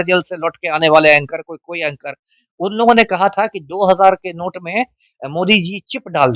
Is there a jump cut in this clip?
no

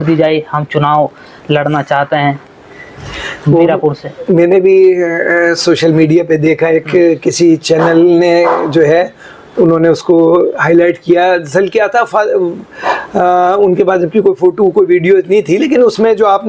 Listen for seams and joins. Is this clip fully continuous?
yes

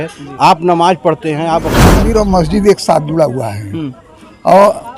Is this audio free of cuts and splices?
no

